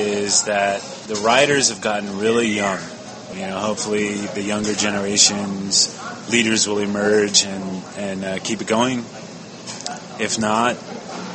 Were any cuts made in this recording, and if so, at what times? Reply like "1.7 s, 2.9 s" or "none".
3.3 s